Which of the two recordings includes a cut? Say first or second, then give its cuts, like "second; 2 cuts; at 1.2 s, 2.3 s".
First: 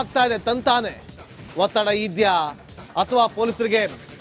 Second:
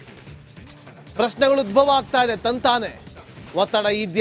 second; 1 cut; at 0.9 s